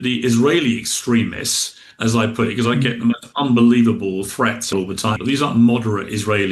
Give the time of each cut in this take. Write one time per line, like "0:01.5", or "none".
0:04.9